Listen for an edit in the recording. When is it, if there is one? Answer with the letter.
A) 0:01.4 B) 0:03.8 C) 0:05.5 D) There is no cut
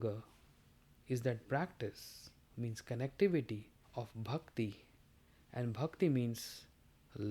B